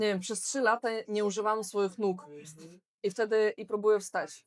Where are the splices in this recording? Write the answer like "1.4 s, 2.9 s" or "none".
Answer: none